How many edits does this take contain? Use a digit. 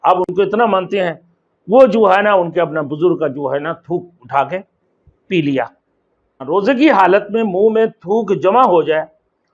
1